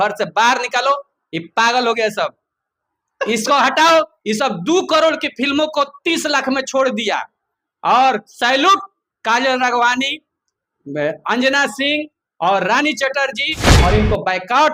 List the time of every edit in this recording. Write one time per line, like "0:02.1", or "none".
0:13.7